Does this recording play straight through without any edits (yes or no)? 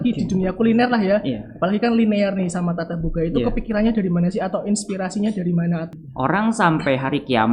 no